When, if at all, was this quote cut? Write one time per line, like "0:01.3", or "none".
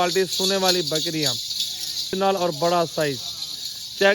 0:02.1